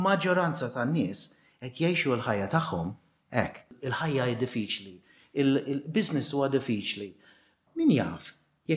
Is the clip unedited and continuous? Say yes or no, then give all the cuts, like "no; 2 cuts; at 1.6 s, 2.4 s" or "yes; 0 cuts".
no; 2 cuts; at 3.8 s, 7.6 s